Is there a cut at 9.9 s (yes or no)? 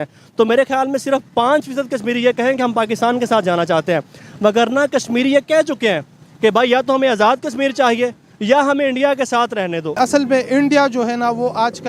yes